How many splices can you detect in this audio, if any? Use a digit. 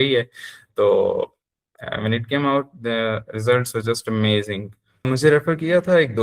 1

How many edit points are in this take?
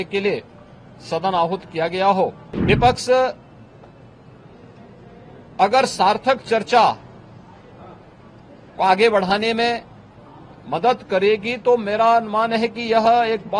1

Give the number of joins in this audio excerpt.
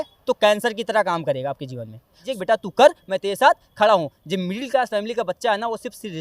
1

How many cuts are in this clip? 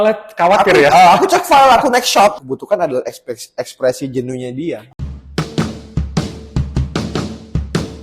2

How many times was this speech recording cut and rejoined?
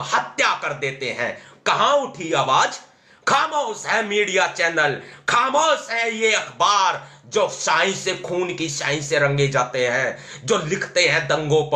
0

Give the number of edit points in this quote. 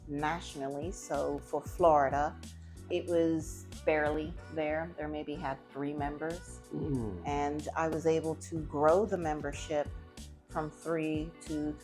2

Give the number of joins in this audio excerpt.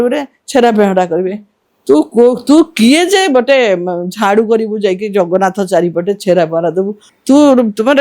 1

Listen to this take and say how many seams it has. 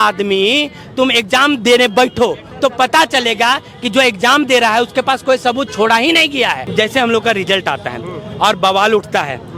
1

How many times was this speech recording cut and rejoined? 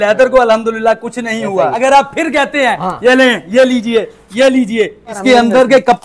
2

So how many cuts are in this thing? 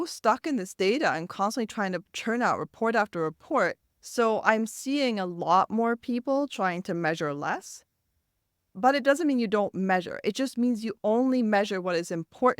1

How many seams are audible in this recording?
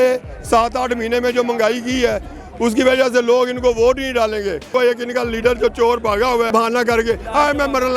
2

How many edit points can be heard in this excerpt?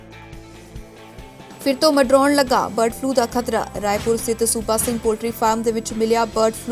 1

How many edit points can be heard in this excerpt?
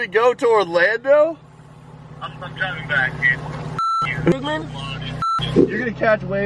1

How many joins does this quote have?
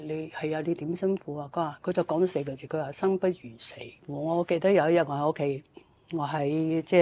1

